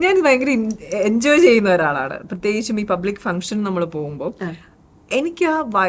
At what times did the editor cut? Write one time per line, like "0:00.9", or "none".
none